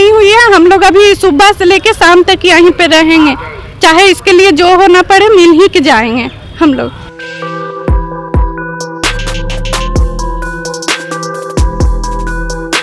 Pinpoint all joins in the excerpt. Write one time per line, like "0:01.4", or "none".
none

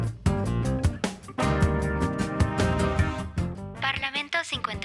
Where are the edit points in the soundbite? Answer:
0:03.7

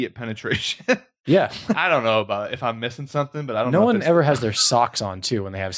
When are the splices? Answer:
0:01.8

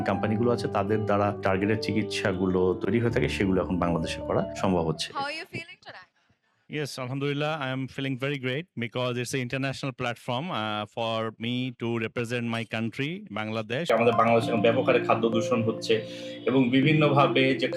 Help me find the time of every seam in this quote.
0:13.9

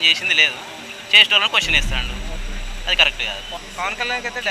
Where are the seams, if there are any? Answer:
0:03.6

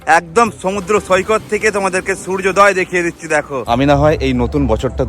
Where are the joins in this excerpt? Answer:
0:03.6

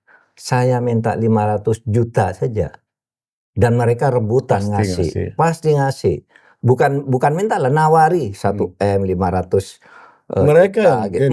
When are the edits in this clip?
none

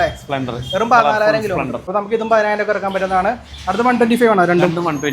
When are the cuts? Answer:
0:01.9

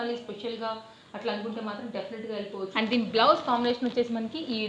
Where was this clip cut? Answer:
0:02.6

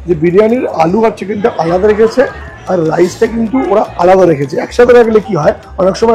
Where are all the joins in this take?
none

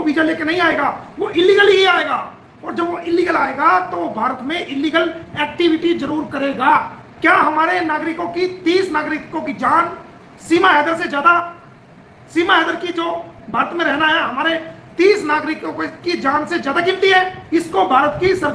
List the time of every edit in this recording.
0:07.0
0:17.4

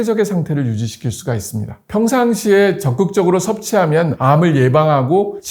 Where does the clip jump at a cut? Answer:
none

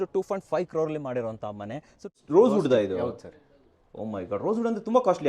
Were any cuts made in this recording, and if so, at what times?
0:02.1

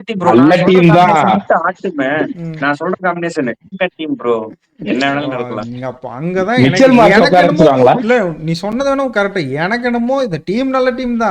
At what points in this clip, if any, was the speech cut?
0:03.7

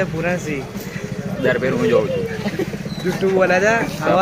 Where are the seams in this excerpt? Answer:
none

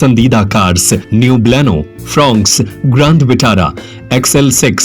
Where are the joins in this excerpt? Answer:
0:01.0

